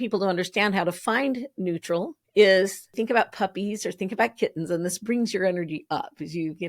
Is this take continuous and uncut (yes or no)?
no